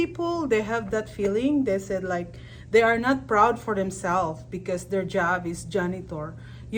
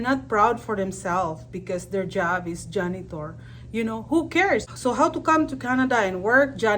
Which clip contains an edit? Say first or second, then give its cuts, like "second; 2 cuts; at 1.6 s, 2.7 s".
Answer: second; 1 cut; at 4.7 s